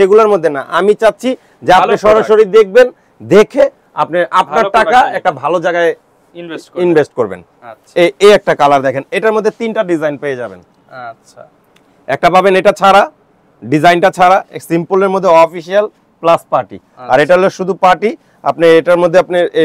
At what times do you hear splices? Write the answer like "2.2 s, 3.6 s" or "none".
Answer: none